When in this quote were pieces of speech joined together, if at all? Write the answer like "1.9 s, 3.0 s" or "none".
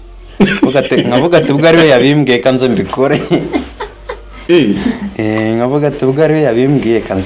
none

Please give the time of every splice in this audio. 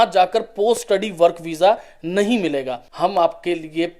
2.8 s

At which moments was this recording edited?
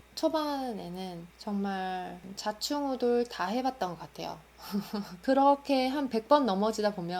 5.1 s

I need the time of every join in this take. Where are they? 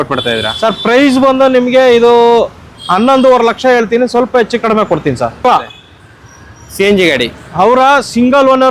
5.4 s

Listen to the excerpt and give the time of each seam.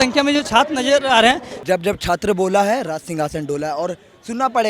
1.5 s

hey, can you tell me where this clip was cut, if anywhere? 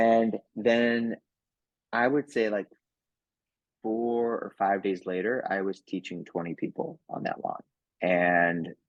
none

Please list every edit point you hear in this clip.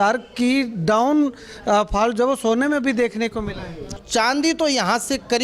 4.0 s

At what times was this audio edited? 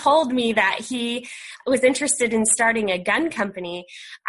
1.6 s

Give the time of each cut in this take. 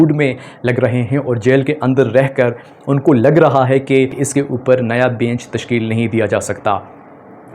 4.2 s

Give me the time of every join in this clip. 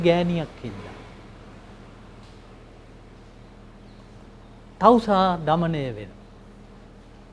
none

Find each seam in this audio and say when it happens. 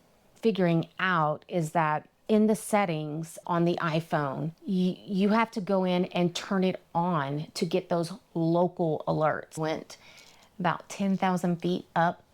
9.5 s

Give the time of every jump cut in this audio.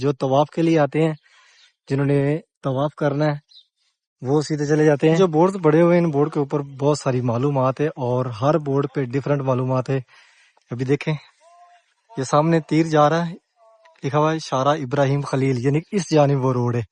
5.2 s

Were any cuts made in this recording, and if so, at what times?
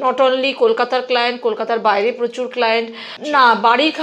3.1 s

